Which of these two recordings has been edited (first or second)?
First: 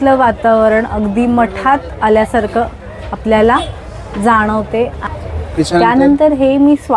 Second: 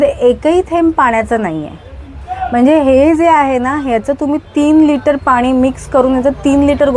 first